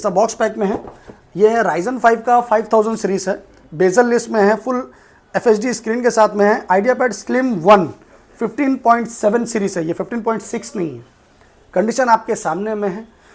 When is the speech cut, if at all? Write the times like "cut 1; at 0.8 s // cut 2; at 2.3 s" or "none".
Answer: none